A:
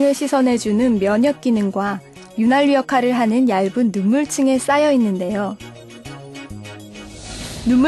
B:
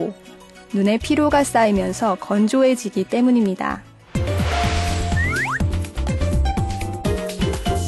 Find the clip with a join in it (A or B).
B